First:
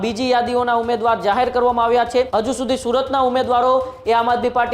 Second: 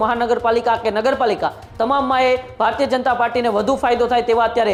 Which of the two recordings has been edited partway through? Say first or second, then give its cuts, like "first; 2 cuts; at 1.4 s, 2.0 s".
first; 1 cut; at 2.3 s